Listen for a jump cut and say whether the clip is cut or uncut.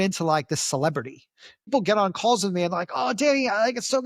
cut